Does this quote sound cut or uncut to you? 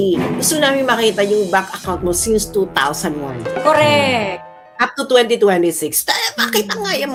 uncut